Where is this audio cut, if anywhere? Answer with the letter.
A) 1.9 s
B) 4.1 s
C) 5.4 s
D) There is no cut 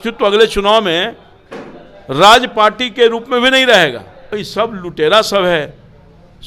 B